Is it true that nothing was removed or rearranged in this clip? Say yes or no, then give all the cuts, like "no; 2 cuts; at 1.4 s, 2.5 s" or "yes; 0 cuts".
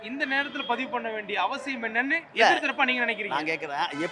yes; 0 cuts